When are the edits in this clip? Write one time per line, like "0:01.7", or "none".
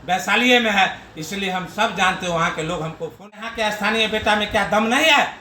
0:03.4

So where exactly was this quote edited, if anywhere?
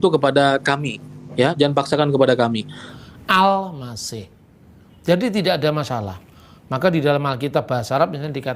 0:02.9

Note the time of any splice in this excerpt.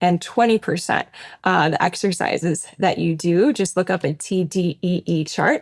none

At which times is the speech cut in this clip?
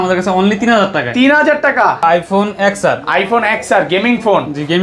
0:02.0

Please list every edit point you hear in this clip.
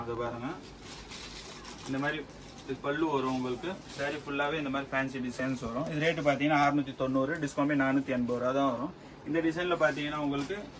none

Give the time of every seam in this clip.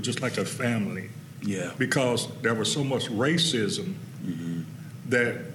none

